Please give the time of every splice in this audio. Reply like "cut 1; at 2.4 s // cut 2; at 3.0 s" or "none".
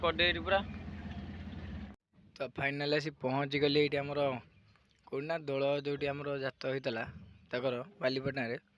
cut 1; at 2.1 s

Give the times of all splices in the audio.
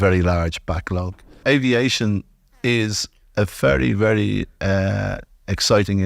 cut 1; at 1.4 s

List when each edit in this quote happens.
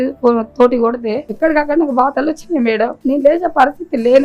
cut 1; at 1.2 s // cut 2; at 3.0 s

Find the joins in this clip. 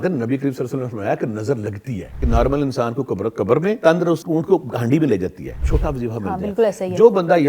cut 1; at 2.2 s // cut 2; at 4.0 s // cut 3; at 5.7 s

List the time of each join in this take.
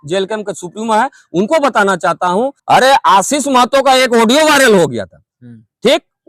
cut 1; at 2.6 s

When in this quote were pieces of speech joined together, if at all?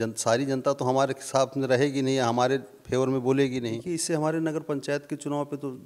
cut 1; at 3.8 s

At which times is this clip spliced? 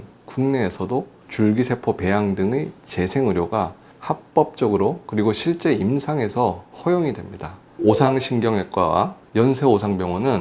cut 1; at 7.7 s

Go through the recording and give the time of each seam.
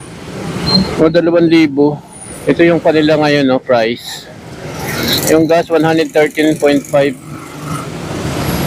cut 1; at 2.3 s

